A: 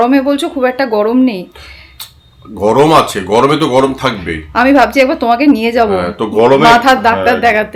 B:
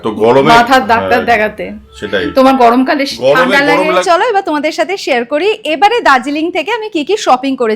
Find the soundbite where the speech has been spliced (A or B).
B